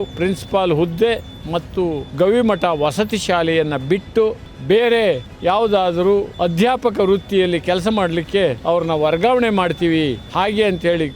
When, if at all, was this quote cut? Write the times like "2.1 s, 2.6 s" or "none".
2.1 s, 4.5 s, 5.3 s, 6.3 s, 8.6 s, 10.2 s